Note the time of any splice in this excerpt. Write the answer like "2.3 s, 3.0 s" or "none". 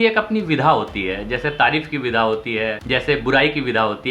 2.8 s